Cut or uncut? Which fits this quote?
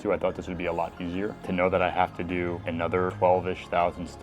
cut